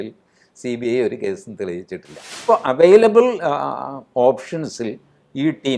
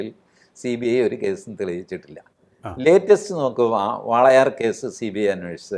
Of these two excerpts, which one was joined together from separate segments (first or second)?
first